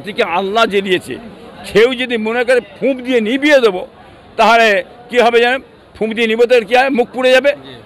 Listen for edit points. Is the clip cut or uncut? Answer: uncut